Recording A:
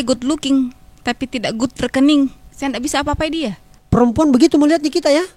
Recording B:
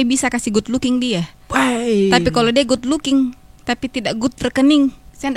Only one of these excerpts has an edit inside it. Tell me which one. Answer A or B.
A